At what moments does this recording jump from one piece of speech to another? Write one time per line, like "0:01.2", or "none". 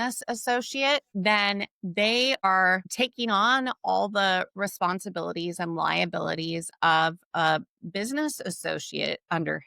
0:01.1
0:02.5